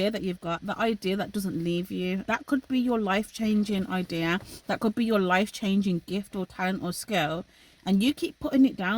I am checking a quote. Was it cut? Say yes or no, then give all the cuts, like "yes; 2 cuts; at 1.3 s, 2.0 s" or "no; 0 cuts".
yes; 1 cut; at 2.2 s